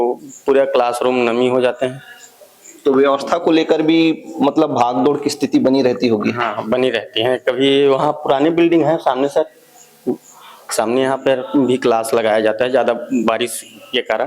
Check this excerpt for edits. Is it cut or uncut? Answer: uncut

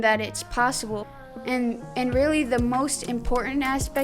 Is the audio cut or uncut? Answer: cut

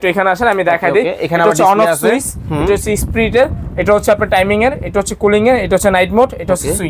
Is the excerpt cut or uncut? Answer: uncut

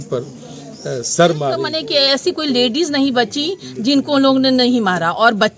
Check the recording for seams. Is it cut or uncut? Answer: cut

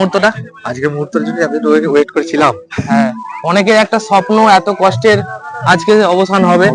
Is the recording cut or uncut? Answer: uncut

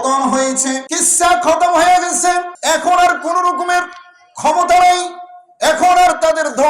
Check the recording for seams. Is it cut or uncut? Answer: cut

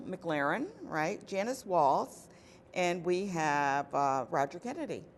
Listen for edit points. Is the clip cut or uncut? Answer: uncut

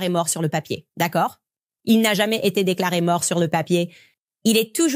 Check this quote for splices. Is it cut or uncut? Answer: uncut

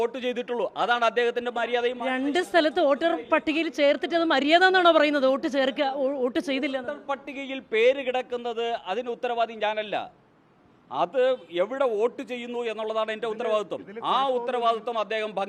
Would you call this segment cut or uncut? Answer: uncut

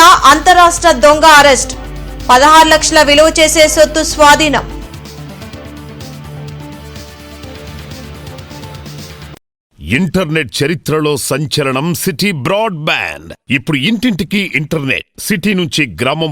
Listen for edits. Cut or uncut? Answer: cut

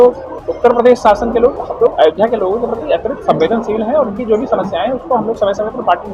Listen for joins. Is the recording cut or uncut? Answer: uncut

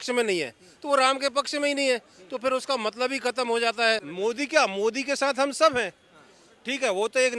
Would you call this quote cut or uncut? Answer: cut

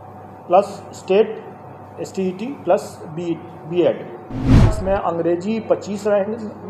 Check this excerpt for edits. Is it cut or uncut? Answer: cut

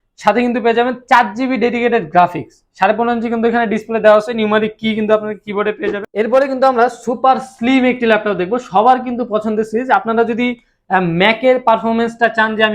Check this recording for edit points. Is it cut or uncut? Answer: cut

